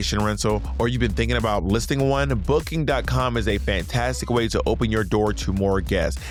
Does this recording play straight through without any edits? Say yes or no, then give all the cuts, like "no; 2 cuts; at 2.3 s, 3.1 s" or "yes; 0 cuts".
yes; 0 cuts